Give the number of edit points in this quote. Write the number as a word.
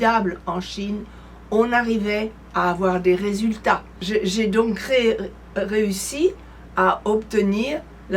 one